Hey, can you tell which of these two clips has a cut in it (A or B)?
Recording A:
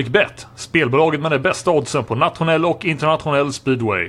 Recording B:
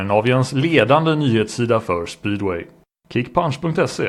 B